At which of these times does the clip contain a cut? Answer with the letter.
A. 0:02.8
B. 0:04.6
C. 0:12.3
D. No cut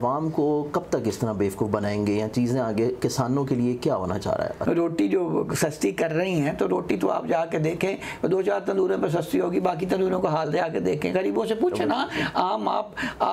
B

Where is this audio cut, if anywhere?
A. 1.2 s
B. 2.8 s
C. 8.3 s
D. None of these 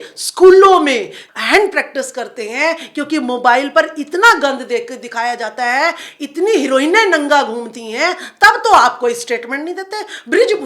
A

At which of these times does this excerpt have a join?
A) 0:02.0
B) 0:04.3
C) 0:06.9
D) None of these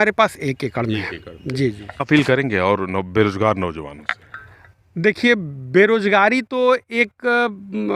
A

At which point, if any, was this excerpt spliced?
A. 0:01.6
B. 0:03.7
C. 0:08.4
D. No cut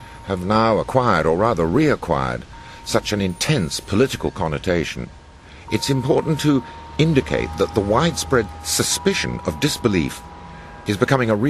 B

